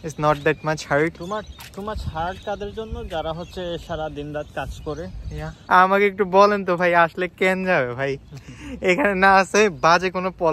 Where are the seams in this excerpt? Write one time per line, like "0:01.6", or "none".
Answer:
0:05.6